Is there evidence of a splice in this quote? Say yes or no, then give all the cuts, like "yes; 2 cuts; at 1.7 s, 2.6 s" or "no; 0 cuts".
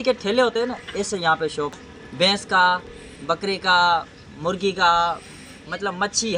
yes; 1 cut; at 1.8 s